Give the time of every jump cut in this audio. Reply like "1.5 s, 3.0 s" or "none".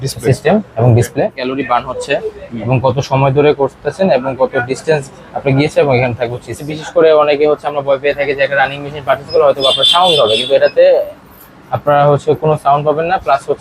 1.4 s, 6.7 s